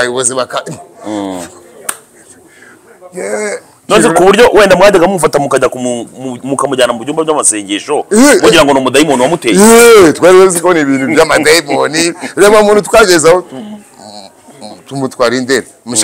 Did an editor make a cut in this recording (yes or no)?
no